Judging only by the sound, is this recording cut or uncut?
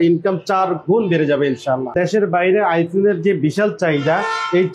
cut